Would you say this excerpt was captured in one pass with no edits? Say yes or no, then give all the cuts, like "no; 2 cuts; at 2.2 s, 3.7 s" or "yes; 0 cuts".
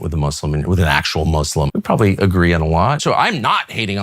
no; 2 cuts; at 1.7 s, 3.0 s